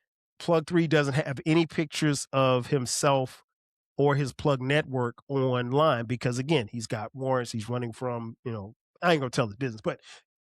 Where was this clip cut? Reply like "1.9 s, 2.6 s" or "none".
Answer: 8.8 s